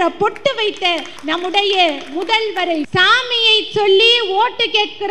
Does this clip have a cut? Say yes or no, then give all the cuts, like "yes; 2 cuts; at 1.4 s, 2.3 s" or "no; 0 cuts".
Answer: yes; 2 cuts; at 1.1 s, 2.9 s